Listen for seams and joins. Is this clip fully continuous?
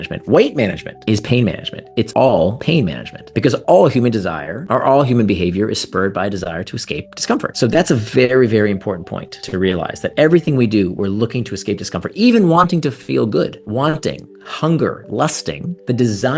yes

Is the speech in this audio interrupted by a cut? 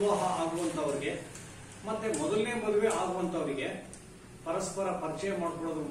no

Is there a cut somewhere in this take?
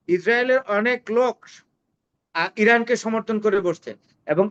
no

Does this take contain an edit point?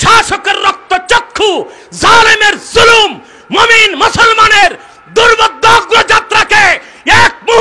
no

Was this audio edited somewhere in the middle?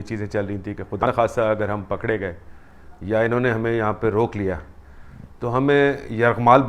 yes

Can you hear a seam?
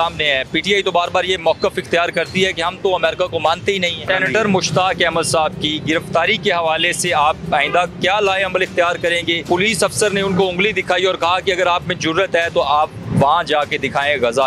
yes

